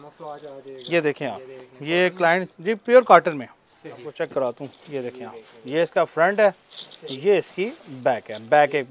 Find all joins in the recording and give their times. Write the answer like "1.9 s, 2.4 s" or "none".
4.1 s